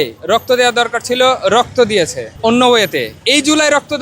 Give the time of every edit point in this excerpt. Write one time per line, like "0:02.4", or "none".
0:02.2

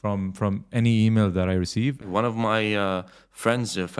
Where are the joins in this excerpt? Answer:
0:02.1

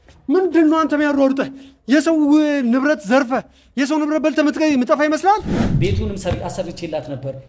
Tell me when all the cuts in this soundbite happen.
0:05.6

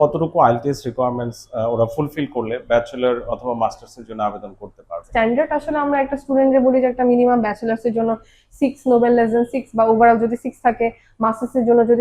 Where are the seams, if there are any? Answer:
0:05.0

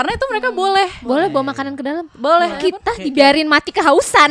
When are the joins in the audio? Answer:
0:02.6

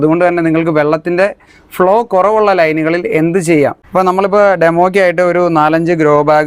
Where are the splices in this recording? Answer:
0:03.8

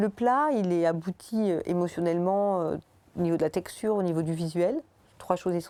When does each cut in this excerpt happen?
none

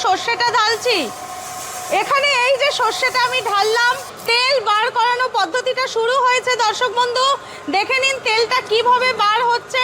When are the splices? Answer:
0:04.1

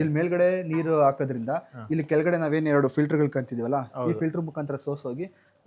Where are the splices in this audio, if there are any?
none

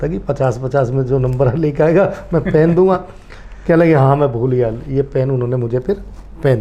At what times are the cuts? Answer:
none

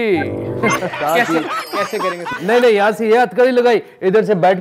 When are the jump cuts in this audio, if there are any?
0:00.9
0:02.3

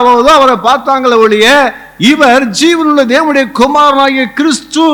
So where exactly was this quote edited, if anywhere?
none

